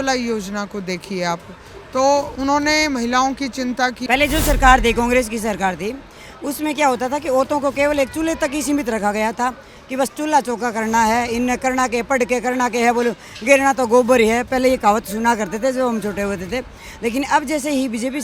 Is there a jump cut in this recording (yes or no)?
yes